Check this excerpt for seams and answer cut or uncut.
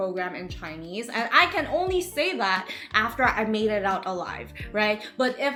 uncut